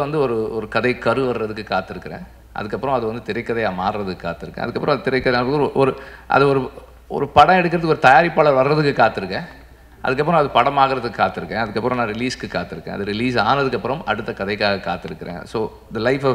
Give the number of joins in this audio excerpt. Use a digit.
0